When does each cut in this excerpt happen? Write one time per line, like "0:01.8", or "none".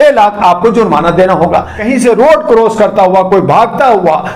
0:01.8